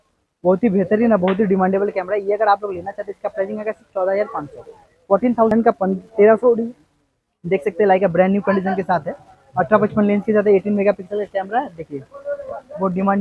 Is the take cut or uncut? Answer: cut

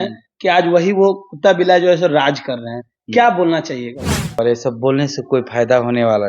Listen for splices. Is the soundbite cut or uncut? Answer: cut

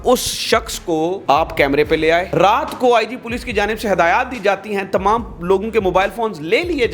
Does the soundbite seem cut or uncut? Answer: cut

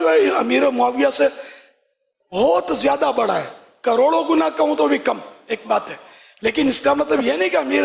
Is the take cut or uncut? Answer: uncut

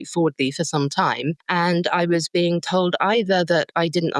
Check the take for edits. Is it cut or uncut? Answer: cut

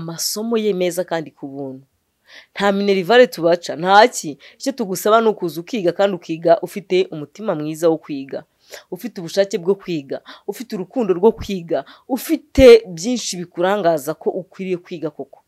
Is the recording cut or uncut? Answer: uncut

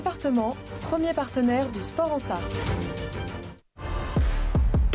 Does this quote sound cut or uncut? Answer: cut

